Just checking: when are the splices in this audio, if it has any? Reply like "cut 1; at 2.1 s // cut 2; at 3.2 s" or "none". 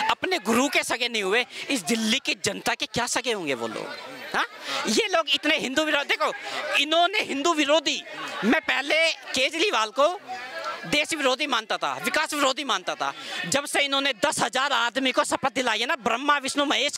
none